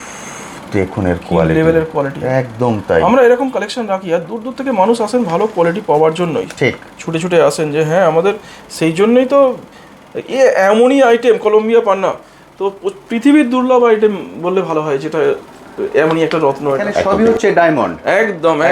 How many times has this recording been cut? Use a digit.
1